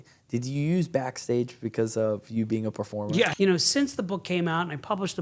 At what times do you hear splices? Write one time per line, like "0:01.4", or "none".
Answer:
0:03.3